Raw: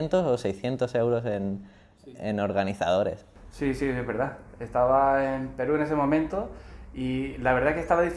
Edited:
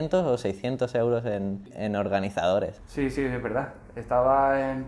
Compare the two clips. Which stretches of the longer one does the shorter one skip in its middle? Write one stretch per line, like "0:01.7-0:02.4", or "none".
0:01.7-0:02.1
0:03.3-0:03.5